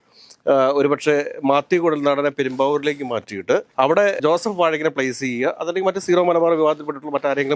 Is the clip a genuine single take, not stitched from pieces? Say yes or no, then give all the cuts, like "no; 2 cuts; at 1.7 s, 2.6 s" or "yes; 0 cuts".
yes; 0 cuts